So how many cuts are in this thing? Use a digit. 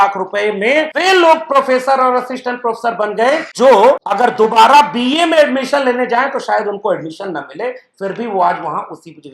3